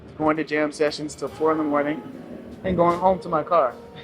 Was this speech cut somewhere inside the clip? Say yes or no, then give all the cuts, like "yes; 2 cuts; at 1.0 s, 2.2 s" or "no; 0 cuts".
no; 0 cuts